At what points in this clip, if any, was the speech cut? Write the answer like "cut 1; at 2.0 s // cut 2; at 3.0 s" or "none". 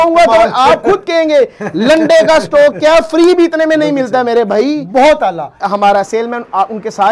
cut 1; at 5.6 s